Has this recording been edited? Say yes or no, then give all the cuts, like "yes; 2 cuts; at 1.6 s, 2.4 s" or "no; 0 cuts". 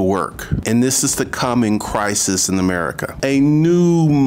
yes; 1 cut; at 3.1 s